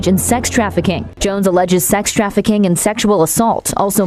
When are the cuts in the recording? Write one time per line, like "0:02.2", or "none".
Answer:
0:01.0

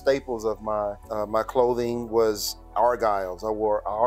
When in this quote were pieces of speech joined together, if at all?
0:01.0

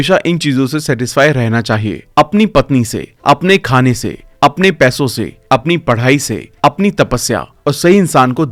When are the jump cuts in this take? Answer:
none

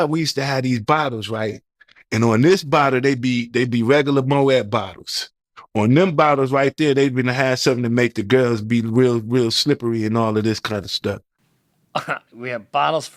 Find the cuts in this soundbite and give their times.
none

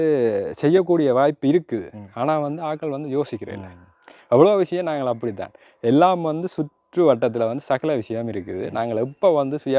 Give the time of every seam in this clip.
none

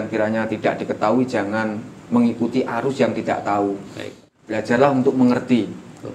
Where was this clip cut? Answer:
none

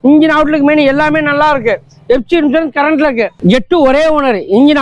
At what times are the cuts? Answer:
0:03.3

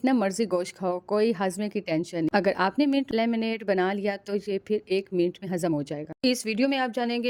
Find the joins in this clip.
none

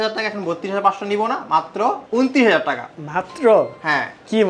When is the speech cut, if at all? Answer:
none

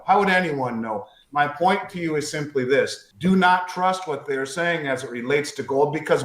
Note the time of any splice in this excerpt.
0:03.0

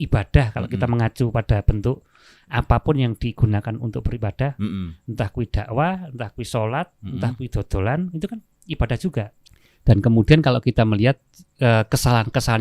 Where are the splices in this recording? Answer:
0:09.4

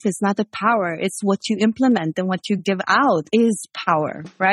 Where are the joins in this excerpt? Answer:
0:03.3

